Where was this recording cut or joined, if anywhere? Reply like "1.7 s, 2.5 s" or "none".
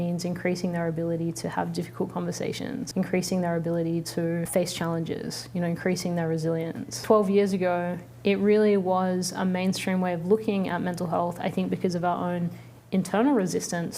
2.9 s, 4.5 s, 7.0 s